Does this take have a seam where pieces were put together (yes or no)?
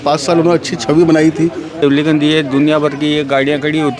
yes